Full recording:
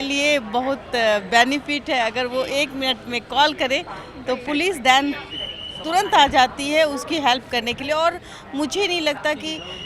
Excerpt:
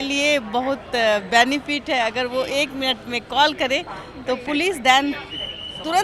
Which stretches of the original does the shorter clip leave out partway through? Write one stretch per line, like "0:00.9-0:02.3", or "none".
none

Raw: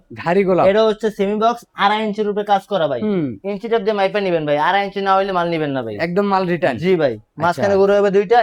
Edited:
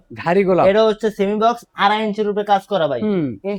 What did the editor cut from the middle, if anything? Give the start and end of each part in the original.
none

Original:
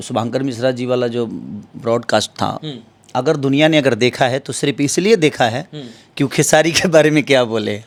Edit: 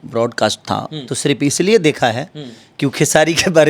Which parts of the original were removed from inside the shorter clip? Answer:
0:02.8-0:04.5

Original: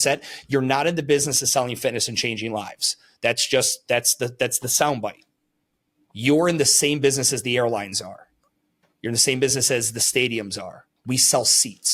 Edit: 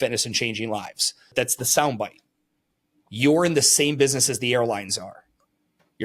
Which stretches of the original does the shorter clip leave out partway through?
0:03.1-0:04.3

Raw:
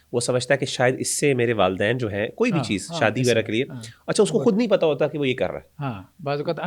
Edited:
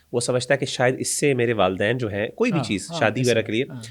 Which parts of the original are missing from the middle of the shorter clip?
none

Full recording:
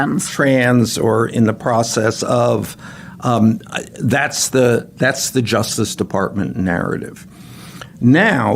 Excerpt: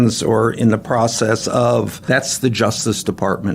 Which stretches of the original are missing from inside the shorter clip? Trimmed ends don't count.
0:02.7-0:04.9

